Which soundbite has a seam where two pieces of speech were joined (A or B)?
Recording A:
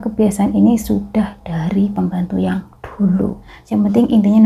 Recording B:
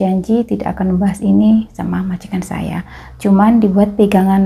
A